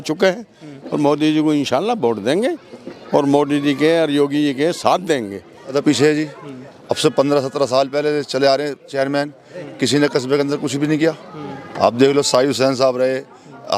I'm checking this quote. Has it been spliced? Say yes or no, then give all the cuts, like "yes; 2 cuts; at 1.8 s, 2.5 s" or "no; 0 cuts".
yes; 1 cut; at 5.7 s